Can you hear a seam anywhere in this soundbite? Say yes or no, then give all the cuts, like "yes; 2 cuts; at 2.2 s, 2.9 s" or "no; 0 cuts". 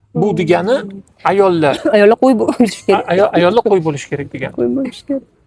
no; 0 cuts